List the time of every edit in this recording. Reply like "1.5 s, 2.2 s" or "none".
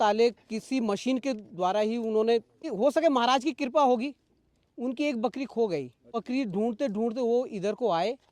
2.7 s, 6.2 s